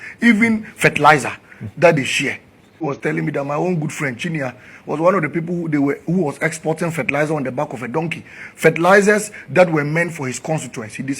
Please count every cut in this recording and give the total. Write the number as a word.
one